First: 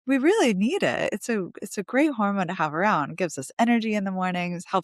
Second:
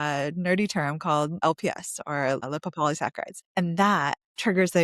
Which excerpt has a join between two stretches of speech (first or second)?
second